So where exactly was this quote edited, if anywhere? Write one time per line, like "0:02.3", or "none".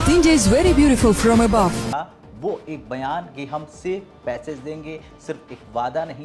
0:01.9